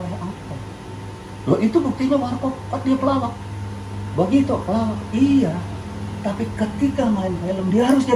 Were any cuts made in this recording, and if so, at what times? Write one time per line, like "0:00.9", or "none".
none